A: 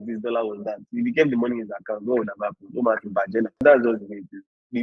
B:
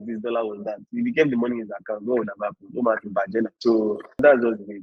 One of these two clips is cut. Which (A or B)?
A